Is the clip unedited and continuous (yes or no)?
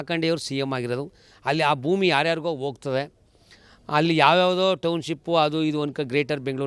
yes